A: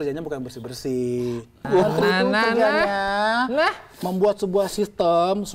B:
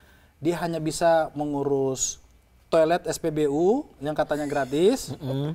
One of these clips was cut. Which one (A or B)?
A